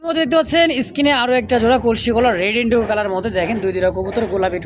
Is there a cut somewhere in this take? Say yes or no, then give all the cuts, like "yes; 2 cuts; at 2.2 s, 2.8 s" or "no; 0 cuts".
no; 0 cuts